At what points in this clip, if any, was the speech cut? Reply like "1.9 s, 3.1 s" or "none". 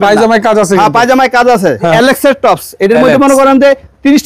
1.9 s